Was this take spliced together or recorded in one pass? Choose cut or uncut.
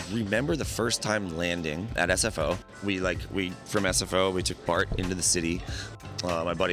cut